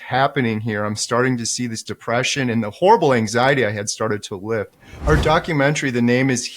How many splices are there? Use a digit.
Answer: 1